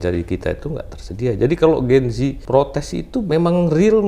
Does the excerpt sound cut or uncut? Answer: cut